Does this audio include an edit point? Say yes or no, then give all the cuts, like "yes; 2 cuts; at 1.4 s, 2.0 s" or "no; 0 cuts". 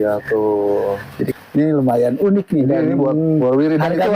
yes; 1 cut; at 1.4 s